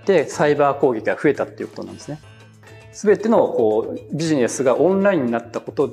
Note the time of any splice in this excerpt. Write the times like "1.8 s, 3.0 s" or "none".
2.6 s